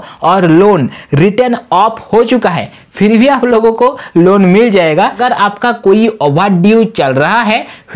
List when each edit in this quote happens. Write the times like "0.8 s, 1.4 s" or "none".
5.2 s